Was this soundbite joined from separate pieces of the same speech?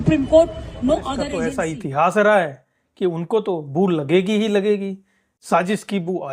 yes; 1 cut; at 1.4 s

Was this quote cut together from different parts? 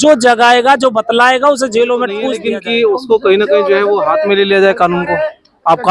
yes; 1 cut; at 2.3 s

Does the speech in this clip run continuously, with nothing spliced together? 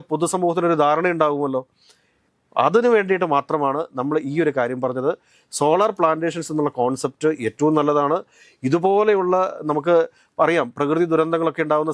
yes; 0 cuts

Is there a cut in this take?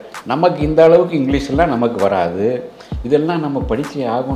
no; 0 cuts

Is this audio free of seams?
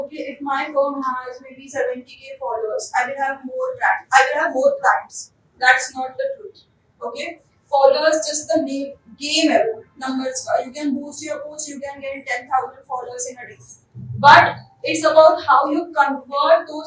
yes; 0 cuts

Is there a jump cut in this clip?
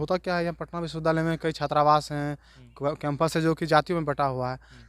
no; 0 cuts

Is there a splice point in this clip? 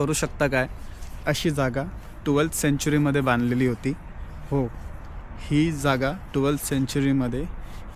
no; 0 cuts

